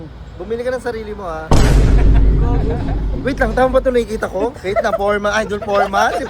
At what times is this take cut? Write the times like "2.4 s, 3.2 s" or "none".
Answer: 4.6 s